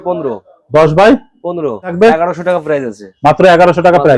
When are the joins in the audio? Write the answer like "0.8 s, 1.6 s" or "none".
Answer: 1.9 s